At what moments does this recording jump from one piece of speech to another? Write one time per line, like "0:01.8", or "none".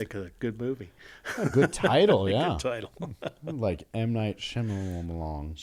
none